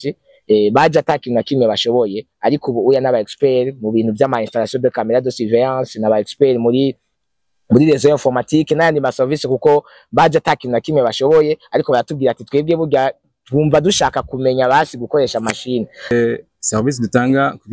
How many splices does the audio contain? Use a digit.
1